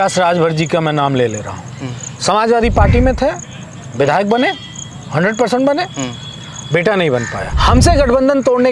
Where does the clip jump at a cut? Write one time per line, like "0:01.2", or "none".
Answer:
0:07.5